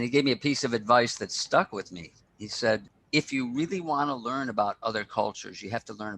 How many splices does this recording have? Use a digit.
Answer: 1